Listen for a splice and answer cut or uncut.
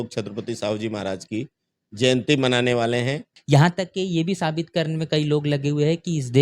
cut